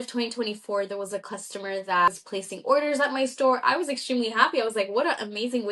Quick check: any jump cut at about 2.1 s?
yes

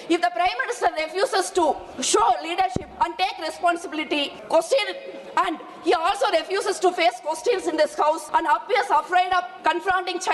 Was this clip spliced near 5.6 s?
no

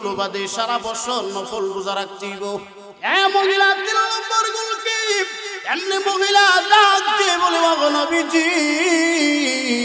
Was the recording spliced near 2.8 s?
yes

